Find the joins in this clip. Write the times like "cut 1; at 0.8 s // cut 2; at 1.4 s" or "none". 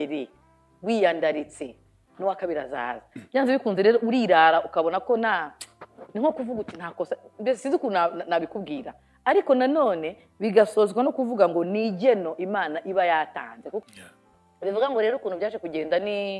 cut 1; at 13.8 s